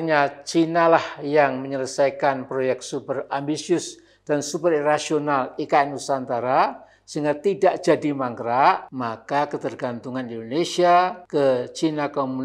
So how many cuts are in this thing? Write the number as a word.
two